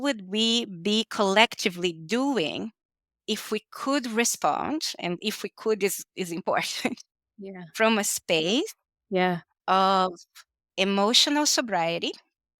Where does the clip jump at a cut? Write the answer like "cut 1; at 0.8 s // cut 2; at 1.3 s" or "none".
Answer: none